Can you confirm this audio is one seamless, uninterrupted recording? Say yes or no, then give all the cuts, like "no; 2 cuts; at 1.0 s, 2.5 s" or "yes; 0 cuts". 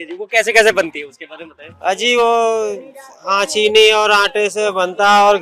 yes; 0 cuts